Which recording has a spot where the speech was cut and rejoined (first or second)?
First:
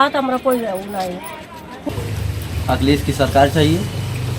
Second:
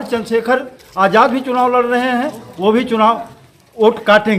first